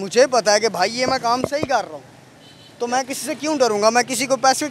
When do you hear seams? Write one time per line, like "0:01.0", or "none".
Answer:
none